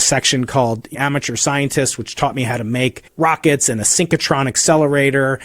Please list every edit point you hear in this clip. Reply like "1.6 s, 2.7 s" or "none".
0.9 s, 3.0 s